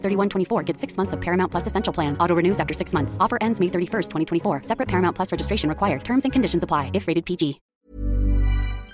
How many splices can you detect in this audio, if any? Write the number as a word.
one